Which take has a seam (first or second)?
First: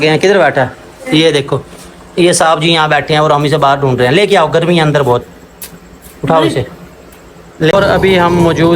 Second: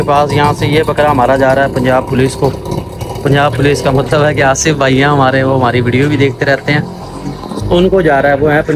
first